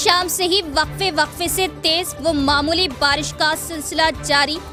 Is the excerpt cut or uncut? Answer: uncut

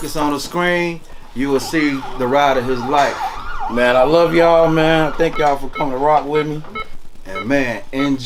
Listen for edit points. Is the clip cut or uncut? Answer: uncut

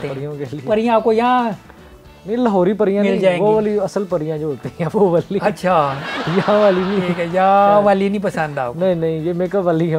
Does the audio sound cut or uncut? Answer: uncut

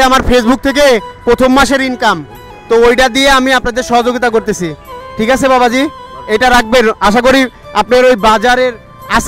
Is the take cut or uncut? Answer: uncut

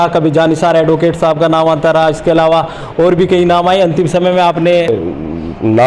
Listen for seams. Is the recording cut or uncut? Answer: cut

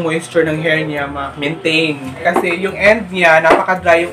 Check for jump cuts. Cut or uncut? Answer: uncut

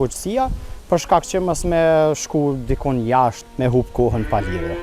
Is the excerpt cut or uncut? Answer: cut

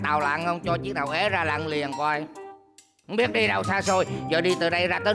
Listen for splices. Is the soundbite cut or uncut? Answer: uncut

